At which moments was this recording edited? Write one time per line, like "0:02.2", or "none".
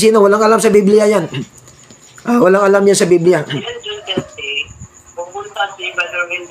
0:03.7